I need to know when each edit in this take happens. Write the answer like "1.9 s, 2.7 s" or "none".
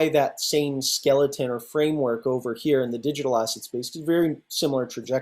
none